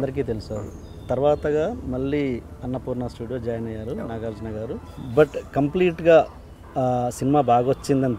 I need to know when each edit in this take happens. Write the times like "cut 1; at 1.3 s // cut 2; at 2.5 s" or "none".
cut 1; at 4.9 s